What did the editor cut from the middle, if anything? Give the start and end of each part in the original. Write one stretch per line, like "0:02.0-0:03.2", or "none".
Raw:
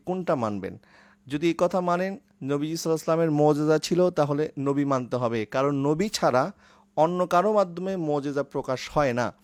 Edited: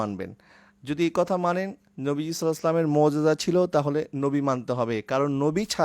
none